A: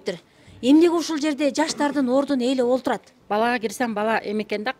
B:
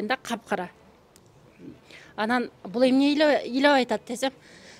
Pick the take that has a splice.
A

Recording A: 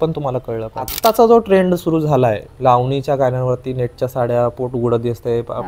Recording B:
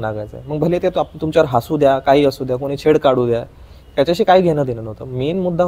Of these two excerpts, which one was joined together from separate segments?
A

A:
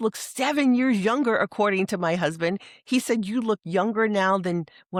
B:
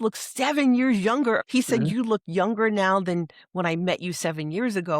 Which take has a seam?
B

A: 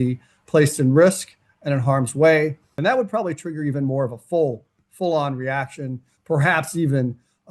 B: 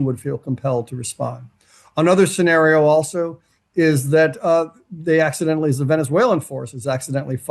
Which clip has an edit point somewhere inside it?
A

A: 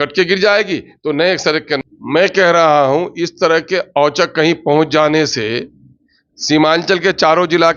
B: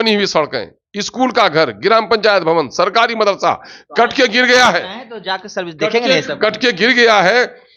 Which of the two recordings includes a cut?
A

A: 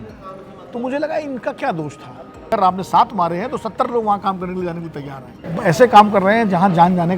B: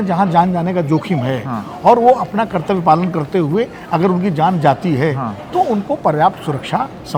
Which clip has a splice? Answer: A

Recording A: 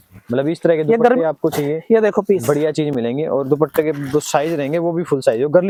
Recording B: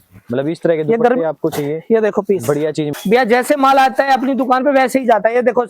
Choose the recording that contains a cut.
B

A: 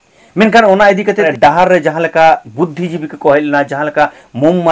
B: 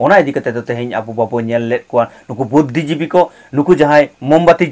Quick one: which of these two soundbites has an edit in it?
A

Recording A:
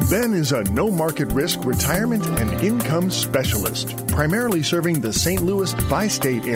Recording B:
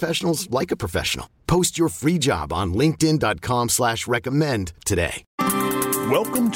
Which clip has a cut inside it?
B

